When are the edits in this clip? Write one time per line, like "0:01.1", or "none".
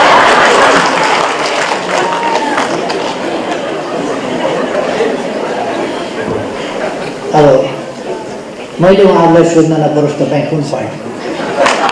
none